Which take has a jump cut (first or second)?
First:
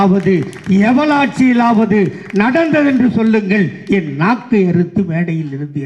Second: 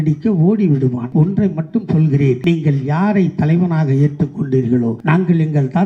second